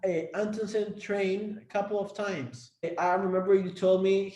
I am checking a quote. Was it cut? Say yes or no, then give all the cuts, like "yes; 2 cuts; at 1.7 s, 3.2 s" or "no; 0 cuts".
yes; 1 cut; at 2.9 s